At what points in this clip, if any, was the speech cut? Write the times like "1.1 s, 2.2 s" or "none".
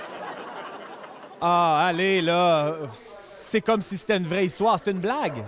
1.3 s